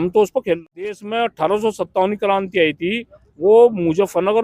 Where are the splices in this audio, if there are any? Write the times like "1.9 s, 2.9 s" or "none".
1.0 s